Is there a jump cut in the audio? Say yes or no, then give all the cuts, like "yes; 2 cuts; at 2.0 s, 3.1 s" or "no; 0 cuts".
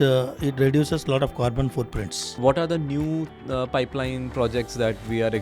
yes; 1 cut; at 2.4 s